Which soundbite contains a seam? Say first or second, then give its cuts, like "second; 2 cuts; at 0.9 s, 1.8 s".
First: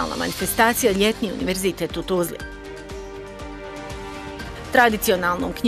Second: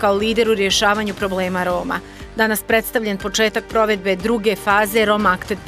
first; 2 cuts; at 2.4 s, 4.7 s